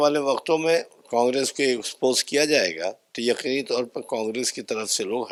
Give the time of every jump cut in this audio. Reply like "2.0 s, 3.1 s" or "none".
none